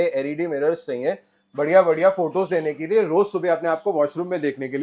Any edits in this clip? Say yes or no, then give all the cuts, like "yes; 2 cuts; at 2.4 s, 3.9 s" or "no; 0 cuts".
no; 0 cuts